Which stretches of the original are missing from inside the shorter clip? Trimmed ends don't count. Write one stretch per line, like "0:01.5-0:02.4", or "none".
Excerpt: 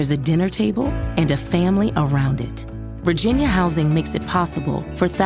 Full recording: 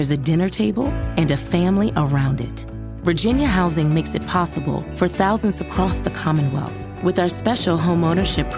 none